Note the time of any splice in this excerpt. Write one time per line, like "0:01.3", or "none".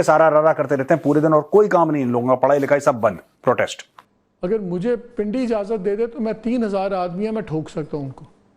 none